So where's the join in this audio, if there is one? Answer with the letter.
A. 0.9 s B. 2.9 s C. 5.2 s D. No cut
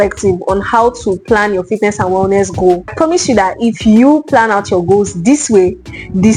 B